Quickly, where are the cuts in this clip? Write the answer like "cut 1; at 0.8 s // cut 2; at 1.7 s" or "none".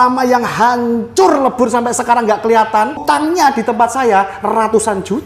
cut 1; at 3.0 s